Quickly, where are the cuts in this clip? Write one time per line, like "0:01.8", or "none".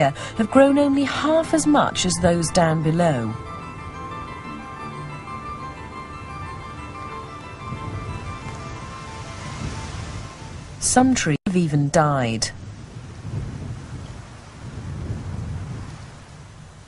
0:08.6